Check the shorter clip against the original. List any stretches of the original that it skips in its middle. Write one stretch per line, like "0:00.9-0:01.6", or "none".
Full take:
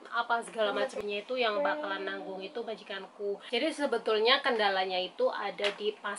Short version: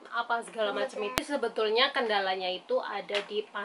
0:01.2-0:03.7